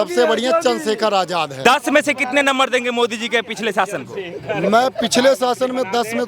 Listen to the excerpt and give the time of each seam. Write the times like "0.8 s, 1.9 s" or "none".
1.5 s